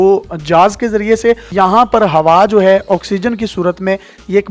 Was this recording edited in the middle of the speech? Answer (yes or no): yes